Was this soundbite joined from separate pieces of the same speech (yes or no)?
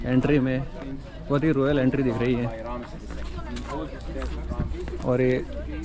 no